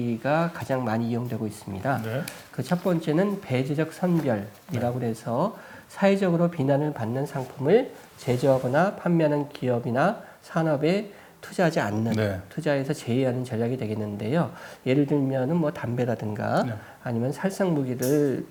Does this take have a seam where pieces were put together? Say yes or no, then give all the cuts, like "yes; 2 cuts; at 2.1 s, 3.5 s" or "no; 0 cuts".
no; 0 cuts